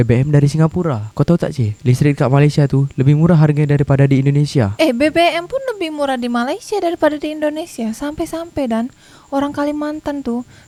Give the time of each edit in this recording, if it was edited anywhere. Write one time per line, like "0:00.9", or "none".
none